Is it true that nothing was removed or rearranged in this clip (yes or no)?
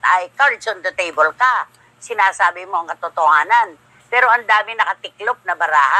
yes